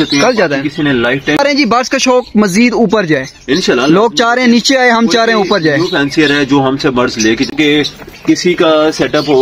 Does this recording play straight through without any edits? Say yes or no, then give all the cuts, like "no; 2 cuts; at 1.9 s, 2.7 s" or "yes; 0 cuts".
no; 2 cuts; at 1.4 s, 7.5 s